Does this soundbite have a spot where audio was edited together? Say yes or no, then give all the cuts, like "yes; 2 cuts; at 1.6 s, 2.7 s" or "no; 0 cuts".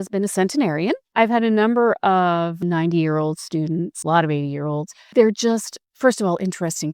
yes; 4 cuts; at 1.0 s, 2.6 s, 4.0 s, 5.1 s